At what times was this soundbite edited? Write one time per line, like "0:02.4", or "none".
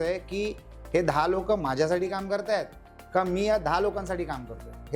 none